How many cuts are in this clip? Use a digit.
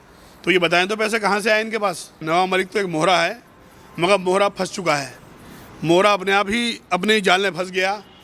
1